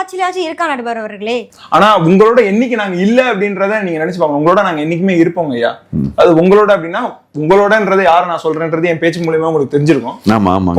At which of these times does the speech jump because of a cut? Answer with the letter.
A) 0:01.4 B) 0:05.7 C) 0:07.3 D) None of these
A